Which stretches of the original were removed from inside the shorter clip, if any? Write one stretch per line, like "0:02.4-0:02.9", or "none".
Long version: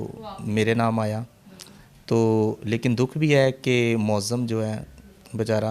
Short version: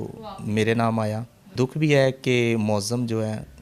0:01.6-0:03.0

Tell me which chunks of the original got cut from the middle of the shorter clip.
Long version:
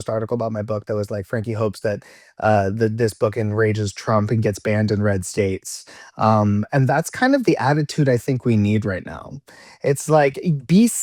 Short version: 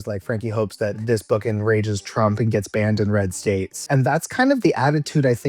0:02.1-0:02.9
0:05.7-0:06.7

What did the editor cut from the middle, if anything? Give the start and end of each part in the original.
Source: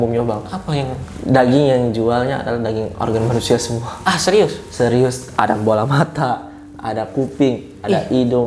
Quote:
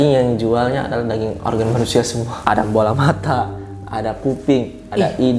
0:03.9-0:05.2

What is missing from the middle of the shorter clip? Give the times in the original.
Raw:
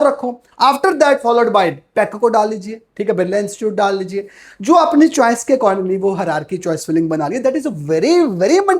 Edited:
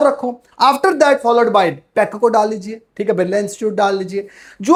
none

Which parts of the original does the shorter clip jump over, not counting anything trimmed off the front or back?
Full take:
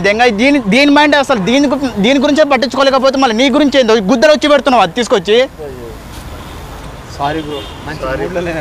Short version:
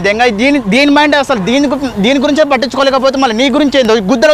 none

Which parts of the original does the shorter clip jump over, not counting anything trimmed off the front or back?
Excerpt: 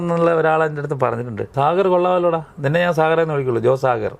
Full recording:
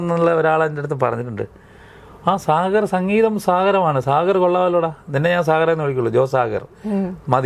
0:01.5-0:04.0

